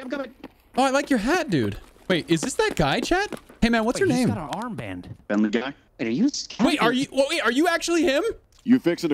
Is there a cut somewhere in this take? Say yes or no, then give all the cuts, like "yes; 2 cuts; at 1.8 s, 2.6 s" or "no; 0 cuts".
yes; 2 cuts; at 1.9 s, 5.1 s